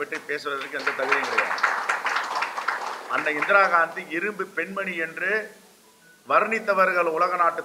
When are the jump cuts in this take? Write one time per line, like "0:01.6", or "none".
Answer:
none